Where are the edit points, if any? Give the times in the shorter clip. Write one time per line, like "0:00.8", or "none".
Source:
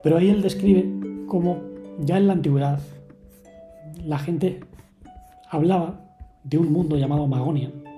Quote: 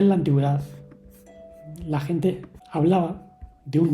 0:02.5